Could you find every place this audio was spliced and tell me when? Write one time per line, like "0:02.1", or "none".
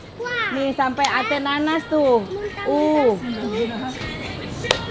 0:04.0